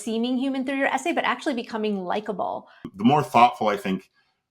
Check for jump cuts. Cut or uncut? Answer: cut